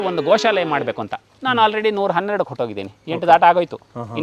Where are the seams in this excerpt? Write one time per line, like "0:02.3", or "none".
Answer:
none